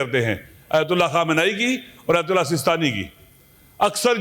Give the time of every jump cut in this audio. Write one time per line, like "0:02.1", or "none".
none